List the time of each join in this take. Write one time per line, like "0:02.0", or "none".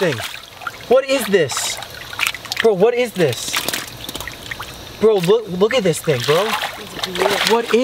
none

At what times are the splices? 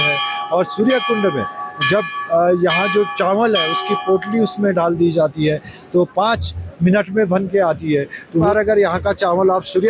0:08.5

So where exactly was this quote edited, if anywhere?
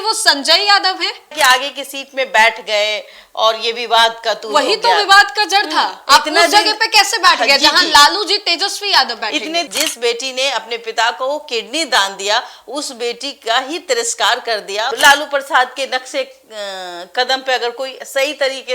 0:01.3
0:09.7
0:14.9

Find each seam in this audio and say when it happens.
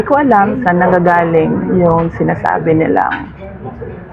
none

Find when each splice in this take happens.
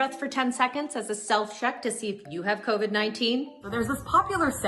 0:03.6

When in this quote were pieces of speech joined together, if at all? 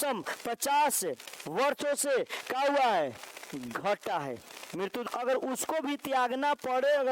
0:05.1

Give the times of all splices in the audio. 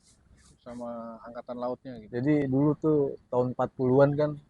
0:02.4

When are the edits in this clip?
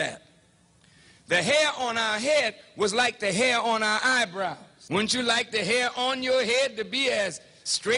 0:04.7

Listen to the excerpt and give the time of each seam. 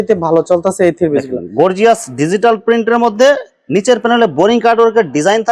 none

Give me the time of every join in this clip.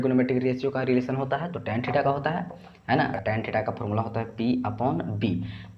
0:03.2

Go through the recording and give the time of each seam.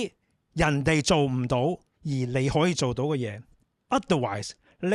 none

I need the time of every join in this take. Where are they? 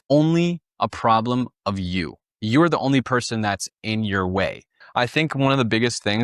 0:01.8
0:04.7

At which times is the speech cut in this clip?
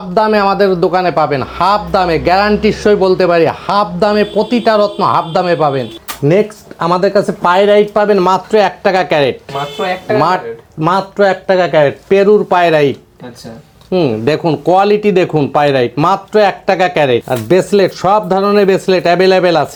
none

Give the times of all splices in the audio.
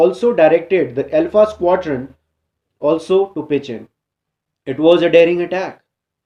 none

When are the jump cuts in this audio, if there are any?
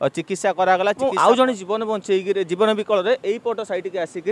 0:01.0

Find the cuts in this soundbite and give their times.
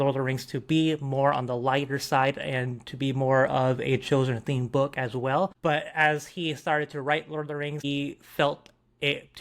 0:05.5
0:07.8

